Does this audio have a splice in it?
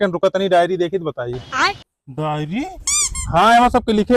no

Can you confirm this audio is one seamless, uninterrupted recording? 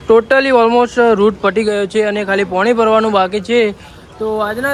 yes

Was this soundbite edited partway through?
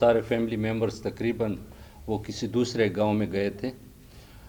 no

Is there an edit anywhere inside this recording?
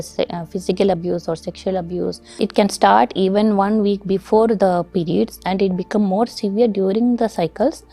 yes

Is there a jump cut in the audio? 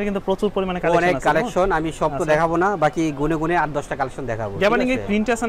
no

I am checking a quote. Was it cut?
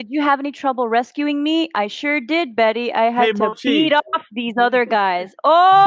no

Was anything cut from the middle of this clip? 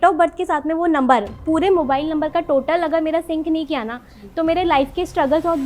no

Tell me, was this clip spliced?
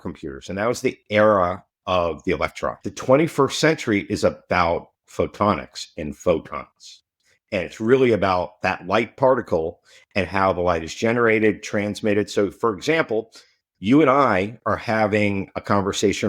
yes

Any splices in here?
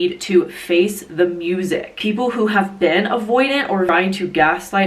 yes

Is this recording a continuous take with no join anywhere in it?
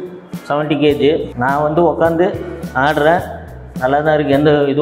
no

